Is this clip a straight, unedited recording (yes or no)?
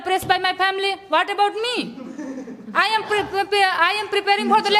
yes